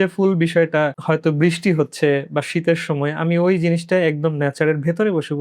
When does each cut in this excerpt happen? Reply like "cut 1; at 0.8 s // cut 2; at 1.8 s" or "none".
cut 1; at 1.0 s